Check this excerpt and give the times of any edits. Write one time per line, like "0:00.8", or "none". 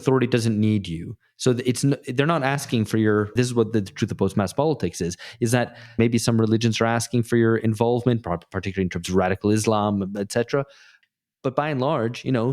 0:03.3
0:06.0